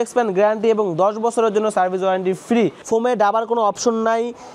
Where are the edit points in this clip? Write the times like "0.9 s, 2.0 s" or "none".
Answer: 2.8 s